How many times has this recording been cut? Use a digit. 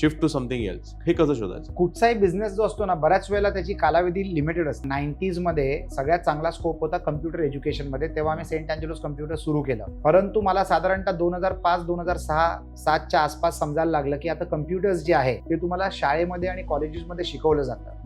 4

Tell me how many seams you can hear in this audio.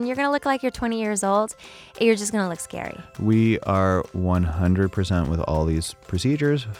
0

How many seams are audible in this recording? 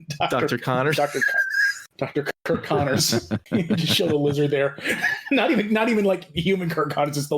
2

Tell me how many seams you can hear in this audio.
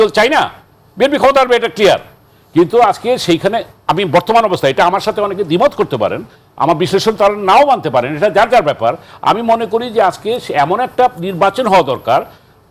0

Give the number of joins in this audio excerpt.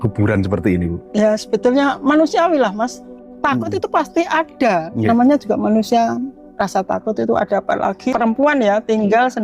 2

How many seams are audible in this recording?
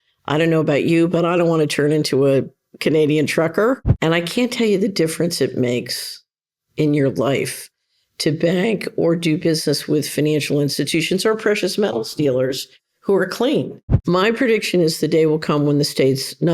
2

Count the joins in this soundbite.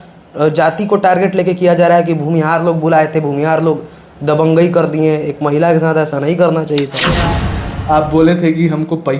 1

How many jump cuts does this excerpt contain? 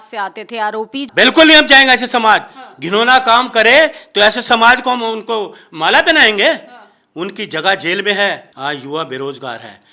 2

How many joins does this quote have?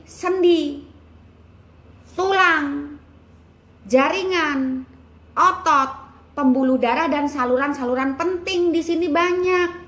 0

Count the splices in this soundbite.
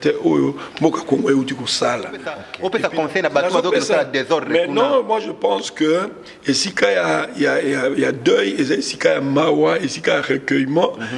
1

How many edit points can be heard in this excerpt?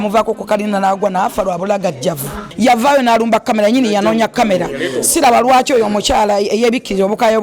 1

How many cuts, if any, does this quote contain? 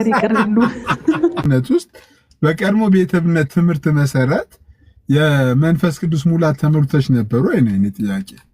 1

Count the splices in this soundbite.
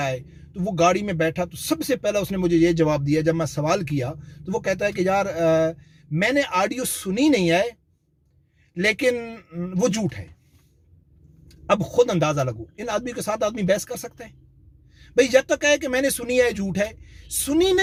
0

